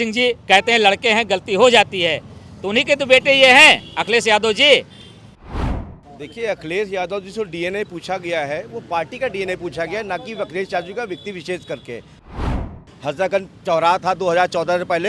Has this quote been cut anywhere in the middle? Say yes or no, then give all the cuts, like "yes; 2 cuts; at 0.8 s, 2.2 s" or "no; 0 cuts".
yes; 2 cuts; at 5.6 s, 12.5 s